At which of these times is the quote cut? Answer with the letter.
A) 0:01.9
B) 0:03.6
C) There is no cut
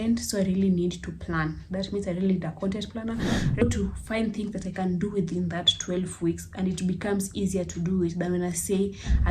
B